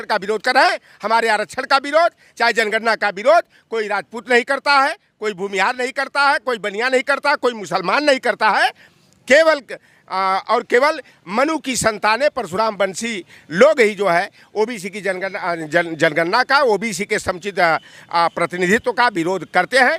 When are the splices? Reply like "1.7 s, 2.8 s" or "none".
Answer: none